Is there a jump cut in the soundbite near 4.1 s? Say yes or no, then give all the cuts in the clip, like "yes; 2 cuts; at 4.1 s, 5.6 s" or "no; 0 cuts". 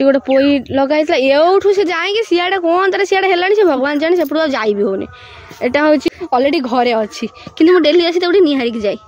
no; 1 cut; at 6.0 s